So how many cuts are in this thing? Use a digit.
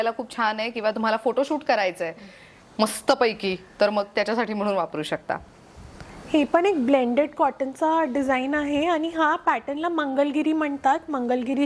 0